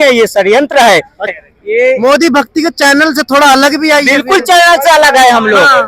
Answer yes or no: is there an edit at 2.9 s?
no